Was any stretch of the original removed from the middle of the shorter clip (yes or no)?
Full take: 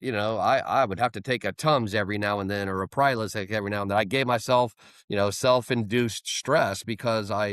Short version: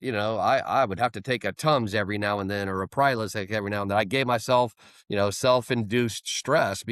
no